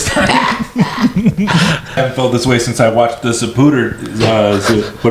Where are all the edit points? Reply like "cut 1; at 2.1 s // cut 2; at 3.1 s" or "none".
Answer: cut 1; at 2.0 s